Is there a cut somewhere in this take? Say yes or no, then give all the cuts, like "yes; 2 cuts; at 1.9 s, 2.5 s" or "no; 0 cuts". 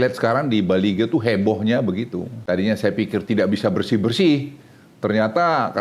yes; 1 cut; at 2.3 s